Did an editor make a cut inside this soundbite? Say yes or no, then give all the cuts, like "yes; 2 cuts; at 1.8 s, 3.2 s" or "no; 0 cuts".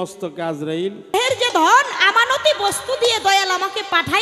yes; 1 cut; at 1.1 s